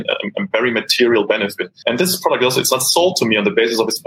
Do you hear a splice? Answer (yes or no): yes